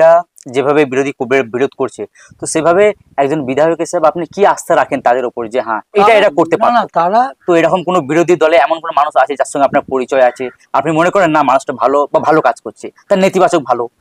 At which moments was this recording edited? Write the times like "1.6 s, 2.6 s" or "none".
7.4 s